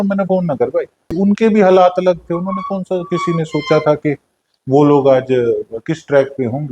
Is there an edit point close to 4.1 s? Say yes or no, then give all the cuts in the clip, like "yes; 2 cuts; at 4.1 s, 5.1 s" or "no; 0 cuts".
no; 1 cut; at 1.1 s